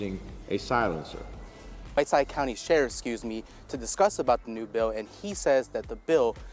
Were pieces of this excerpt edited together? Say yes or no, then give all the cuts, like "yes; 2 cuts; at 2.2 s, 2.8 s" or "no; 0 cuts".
no; 0 cuts